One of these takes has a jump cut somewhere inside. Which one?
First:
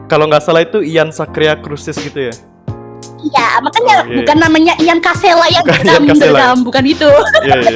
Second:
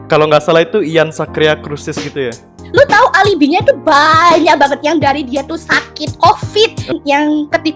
second; 2 cuts; at 2.6 s, 6.9 s

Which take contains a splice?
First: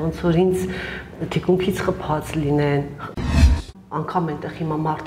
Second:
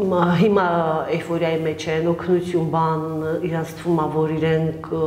first; 1 cut; at 3.4 s

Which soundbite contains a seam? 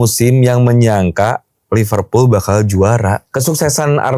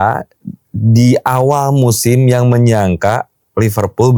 first; 1 cut; at 3.3 s

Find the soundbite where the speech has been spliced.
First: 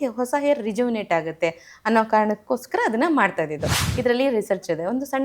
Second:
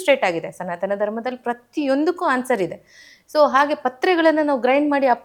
first; 1 cut; at 3.8 s

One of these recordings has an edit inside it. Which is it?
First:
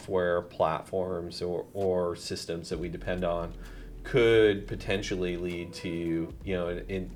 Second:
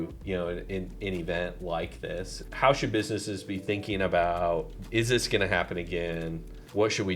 second; 1 cut; at 2.4 s

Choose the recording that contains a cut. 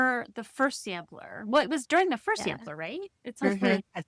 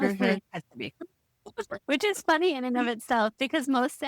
second; 1 cut; at 1.8 s

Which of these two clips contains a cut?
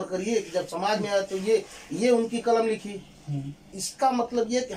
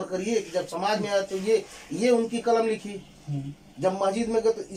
first; 1 cut; at 3.7 s

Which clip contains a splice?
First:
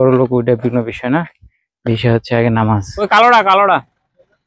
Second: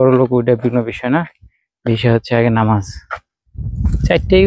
first; 1 cut; at 3.0 s

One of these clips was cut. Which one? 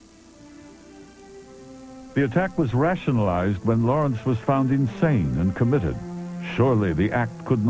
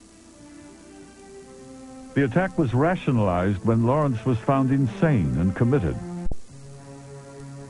first; 1 cut; at 6.4 s

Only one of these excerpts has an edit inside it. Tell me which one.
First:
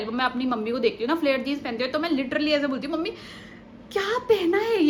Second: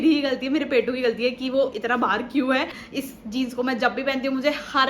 second; 1 cut; at 2.8 s

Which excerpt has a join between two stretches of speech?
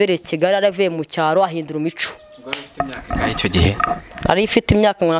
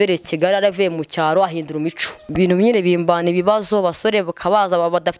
second; 1 cut; at 2.2 s

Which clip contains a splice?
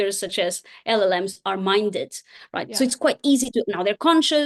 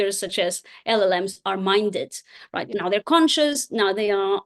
second; 1 cut; at 2.7 s

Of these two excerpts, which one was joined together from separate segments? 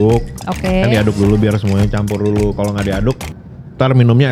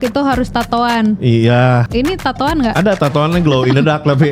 second; 1 cut; at 1.9 s

